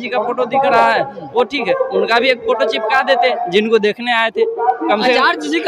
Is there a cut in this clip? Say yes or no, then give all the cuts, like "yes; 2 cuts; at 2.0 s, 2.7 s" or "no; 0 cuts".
no; 0 cuts